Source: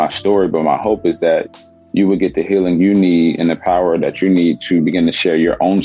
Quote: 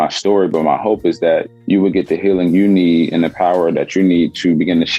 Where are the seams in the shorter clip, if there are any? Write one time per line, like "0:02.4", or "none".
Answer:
0:01.5